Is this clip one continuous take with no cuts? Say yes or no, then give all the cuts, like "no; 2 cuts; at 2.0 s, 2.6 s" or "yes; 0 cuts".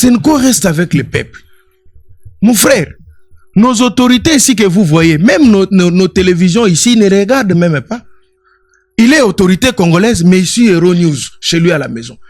yes; 0 cuts